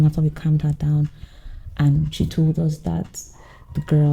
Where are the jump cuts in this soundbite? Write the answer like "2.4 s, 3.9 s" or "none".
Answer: none